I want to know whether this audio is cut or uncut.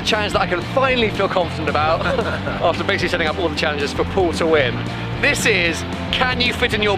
uncut